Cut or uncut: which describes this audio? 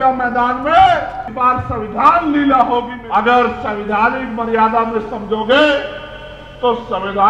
cut